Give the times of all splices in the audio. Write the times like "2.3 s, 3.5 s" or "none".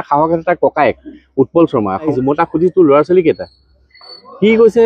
2.1 s